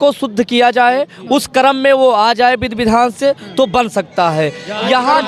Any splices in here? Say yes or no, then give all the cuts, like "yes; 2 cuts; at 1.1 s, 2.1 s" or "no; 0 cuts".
no; 0 cuts